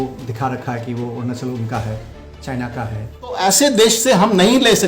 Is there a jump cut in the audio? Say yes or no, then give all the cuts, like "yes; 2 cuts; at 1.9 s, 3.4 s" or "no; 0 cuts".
yes; 1 cut; at 3.4 s